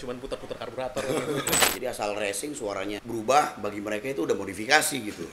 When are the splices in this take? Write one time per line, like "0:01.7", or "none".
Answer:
0:01.6
0:03.0